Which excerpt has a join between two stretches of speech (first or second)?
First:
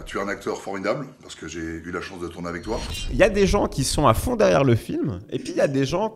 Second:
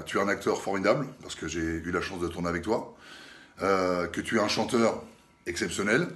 first